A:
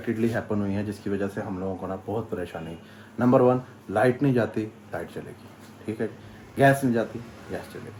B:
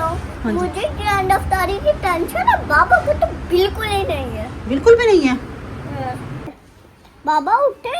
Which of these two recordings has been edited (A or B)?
B